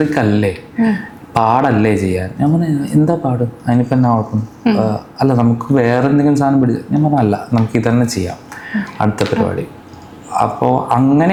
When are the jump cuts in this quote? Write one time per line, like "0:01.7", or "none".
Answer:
none